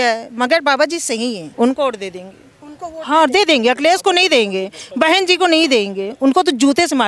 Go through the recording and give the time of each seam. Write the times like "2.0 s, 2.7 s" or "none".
1.5 s